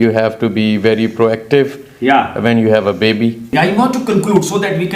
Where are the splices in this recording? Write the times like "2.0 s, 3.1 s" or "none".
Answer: 3.4 s

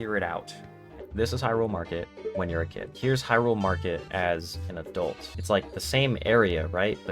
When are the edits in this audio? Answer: 1.0 s, 2.8 s, 4.0 s, 5.3 s

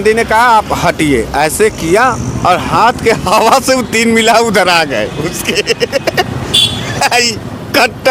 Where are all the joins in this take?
none

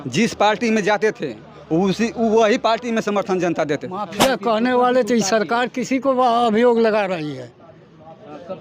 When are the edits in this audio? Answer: 4.1 s

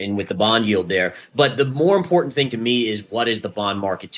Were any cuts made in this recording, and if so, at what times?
none

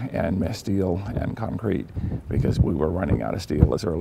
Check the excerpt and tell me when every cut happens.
1.1 s

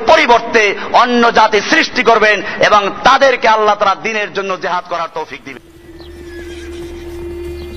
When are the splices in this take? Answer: 5.7 s

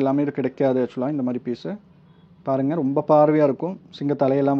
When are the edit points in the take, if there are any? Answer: none

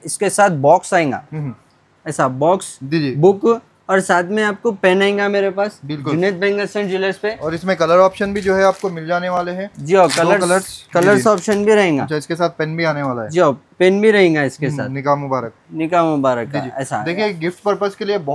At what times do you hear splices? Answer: none

